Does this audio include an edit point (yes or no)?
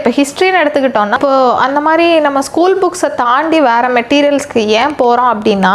yes